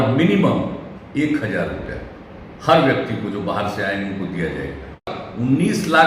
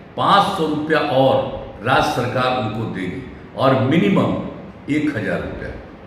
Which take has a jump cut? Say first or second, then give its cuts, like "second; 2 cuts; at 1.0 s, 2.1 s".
first; 1 cut; at 5.0 s